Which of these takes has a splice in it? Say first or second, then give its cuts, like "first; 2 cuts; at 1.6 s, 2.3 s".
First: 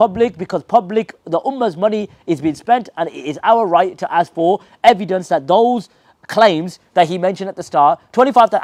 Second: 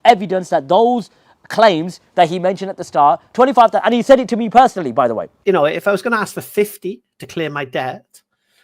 second; 1 cut; at 5.3 s